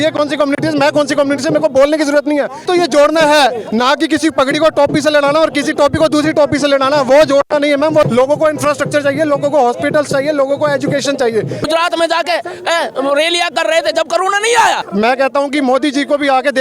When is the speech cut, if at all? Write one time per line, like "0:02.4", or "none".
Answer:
0:02.6
0:08.1
0:11.6
0:14.9